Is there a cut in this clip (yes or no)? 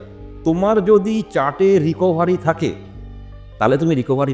no